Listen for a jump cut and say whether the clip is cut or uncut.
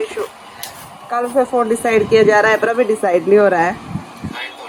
uncut